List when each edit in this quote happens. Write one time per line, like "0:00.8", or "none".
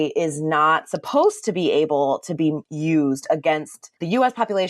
none